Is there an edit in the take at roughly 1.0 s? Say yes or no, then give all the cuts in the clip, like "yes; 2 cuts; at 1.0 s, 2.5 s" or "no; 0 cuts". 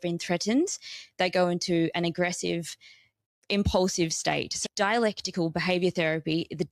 no; 2 cuts; at 3.3 s, 4.6 s